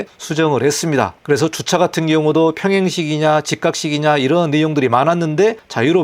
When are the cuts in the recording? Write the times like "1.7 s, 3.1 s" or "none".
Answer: none